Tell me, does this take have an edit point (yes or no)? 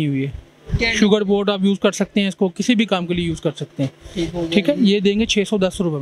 no